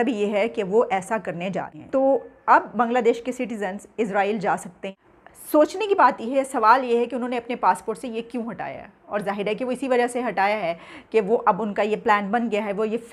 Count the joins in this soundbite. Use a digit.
1